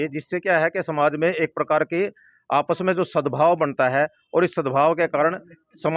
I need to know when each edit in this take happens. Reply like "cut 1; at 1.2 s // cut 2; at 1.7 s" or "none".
none